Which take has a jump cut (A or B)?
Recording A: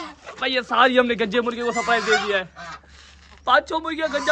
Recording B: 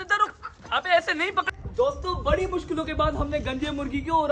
B